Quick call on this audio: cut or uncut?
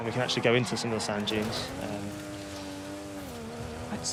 uncut